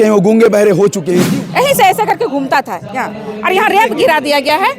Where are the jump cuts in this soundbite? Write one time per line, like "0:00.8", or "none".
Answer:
0:01.3

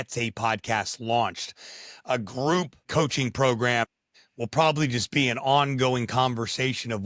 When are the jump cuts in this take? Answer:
none

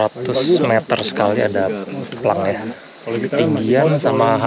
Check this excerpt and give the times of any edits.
0:02.8

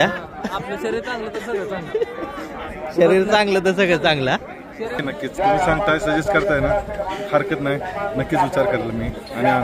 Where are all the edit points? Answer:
0:05.0

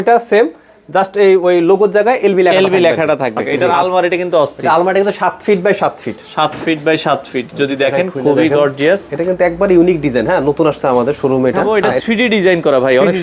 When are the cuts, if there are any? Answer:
0:03.5
0:09.1
0:11.6

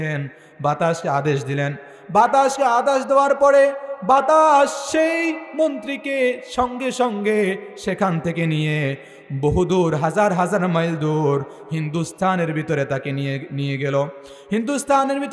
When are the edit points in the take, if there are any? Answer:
none

